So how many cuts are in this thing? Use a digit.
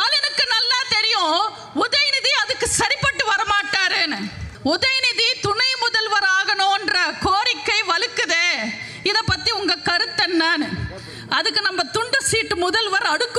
1